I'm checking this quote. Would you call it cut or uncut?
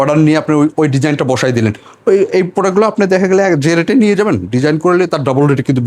uncut